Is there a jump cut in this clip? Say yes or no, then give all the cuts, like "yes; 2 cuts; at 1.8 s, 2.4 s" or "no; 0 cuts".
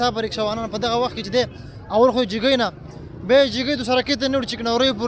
no; 0 cuts